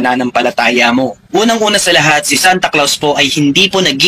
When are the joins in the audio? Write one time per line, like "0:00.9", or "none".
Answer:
0:01.2